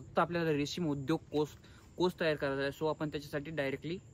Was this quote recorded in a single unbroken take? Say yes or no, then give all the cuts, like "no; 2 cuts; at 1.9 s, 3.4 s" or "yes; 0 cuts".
yes; 0 cuts